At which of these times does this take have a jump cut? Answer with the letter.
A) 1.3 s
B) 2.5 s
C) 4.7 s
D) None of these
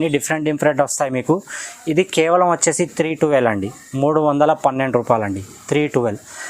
D